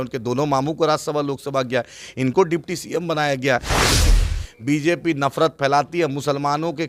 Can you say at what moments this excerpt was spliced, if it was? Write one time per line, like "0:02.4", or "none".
0:04.0